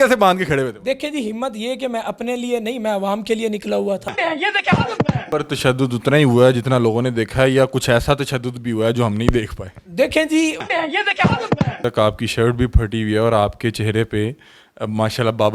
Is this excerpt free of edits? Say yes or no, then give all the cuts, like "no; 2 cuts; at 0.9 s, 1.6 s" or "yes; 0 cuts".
no; 2 cuts; at 5.2 s, 11.8 s